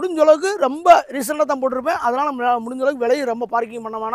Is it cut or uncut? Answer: uncut